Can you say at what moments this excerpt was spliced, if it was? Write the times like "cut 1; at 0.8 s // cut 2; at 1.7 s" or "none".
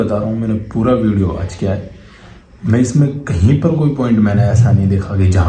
none